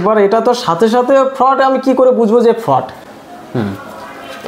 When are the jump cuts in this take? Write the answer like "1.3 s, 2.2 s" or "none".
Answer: none